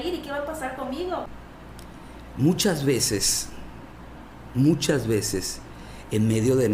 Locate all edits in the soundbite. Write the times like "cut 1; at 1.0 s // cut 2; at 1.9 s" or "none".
cut 1; at 1.3 s